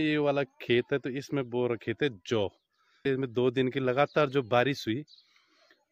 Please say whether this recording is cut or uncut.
cut